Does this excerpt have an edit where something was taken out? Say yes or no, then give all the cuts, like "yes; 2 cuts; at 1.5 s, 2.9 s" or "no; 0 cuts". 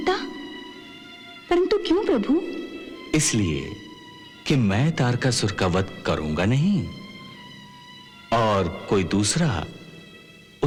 no; 0 cuts